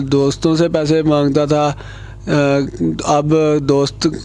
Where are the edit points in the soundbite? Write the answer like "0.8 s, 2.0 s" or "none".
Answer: none